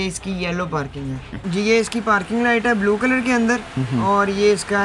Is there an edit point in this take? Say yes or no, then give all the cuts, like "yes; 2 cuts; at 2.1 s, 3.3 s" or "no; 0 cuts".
yes; 1 cut; at 1.3 s